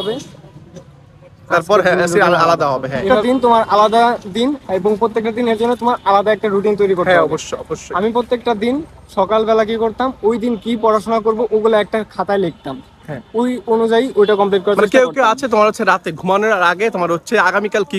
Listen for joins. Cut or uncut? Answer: cut